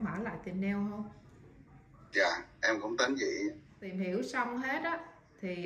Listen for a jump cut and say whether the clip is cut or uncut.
cut